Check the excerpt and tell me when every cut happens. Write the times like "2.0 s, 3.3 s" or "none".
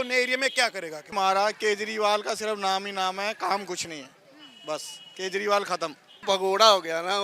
1.0 s, 6.2 s